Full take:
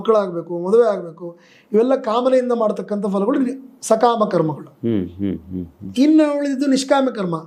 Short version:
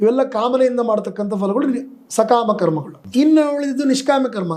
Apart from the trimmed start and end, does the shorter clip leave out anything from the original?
yes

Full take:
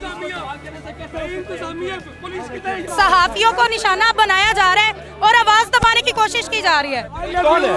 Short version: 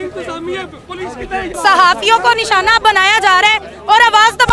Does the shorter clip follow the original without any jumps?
yes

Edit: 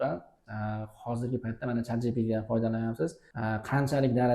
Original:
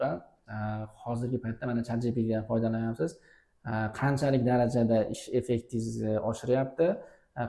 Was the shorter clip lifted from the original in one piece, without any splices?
no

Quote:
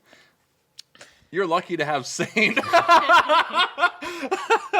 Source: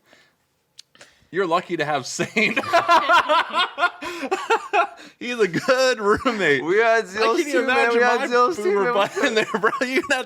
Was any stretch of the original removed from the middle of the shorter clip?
no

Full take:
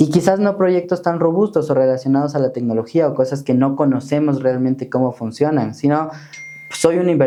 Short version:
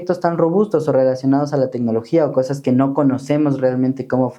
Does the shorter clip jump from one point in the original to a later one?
no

